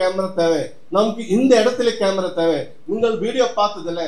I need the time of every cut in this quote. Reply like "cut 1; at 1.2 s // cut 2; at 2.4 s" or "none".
none

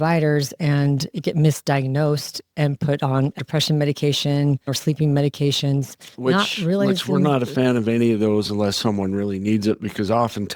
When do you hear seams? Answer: cut 1; at 3.4 s // cut 2; at 4.7 s

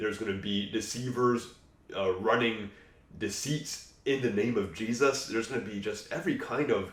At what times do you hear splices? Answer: none

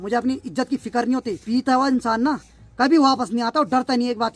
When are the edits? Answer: cut 1; at 1.4 s

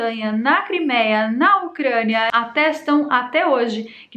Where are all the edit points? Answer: cut 1; at 2.3 s

